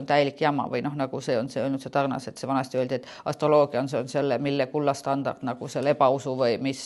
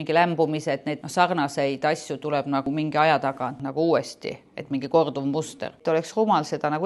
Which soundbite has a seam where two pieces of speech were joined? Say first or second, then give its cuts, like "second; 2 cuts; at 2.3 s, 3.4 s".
second; 4 cuts; at 1.0 s, 2.7 s, 3.6 s, 5.8 s